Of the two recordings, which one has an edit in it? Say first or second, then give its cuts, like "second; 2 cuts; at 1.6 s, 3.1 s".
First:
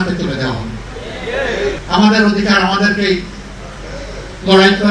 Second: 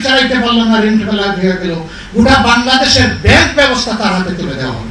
first; 1 cut; at 1.8 s